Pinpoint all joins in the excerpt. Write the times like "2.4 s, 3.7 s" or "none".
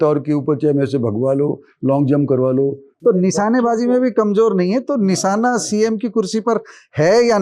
2.9 s

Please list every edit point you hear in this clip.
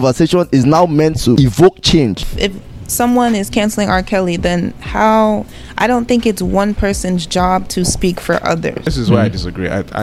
1.4 s, 2.3 s, 8.9 s

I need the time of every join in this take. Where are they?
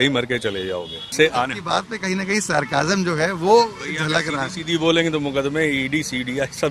1.0 s

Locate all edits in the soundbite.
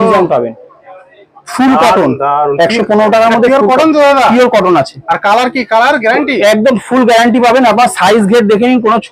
none

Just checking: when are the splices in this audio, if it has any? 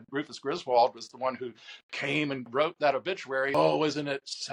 2.5 s, 3.5 s

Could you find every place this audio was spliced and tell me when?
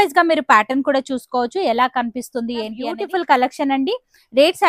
2.8 s

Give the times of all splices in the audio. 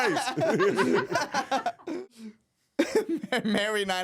1.9 s

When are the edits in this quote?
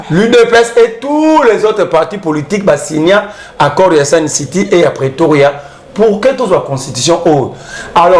none

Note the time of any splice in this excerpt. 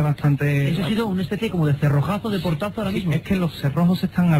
none

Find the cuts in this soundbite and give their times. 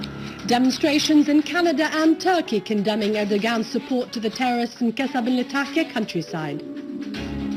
4.7 s

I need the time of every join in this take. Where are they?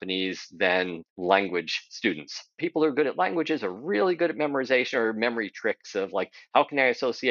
1.0 s, 2.6 s

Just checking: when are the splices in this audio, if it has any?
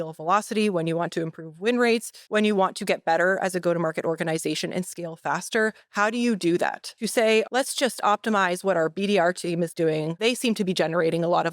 2.2 s, 7.4 s, 10.2 s

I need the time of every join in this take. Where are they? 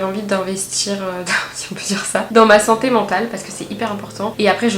none

